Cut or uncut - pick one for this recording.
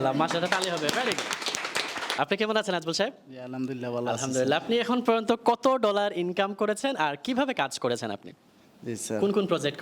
cut